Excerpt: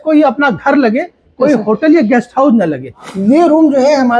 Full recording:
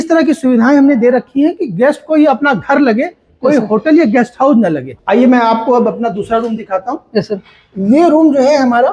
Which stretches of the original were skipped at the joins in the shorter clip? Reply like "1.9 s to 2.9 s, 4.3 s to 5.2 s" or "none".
4.9 s to 7.5 s